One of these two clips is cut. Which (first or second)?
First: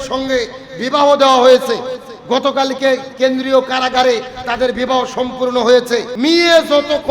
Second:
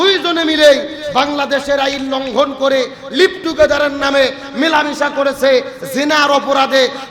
first